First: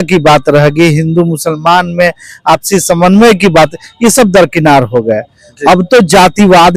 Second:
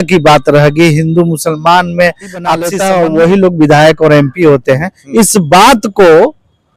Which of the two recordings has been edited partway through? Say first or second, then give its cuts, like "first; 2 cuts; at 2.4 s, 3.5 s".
second; 1 cut; at 2.7 s